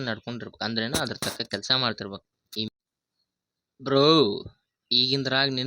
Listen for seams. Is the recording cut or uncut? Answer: cut